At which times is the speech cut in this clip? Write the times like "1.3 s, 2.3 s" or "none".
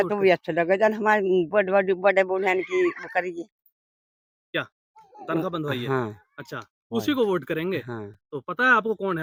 none